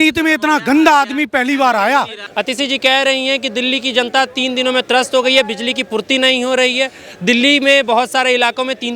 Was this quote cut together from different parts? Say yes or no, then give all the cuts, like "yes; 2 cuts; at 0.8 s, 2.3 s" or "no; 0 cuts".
yes; 1 cut; at 2.2 s